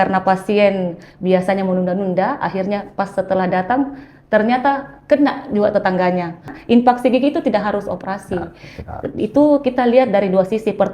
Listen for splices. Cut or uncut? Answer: cut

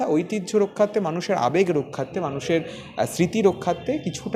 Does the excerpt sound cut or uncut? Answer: uncut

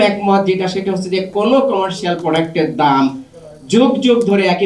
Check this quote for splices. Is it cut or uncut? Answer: uncut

